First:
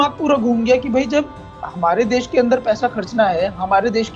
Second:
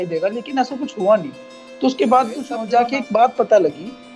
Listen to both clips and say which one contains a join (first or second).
second